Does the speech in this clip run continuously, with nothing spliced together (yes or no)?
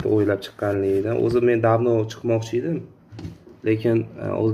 yes